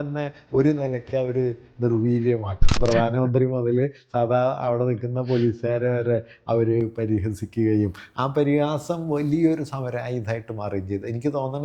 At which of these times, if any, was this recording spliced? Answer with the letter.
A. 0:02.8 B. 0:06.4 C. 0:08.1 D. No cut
A